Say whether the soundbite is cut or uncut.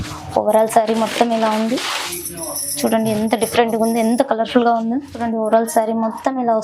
cut